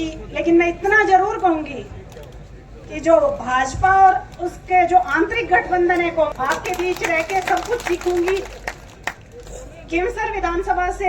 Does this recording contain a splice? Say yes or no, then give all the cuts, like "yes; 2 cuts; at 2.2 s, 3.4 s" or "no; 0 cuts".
yes; 1 cut; at 6.3 s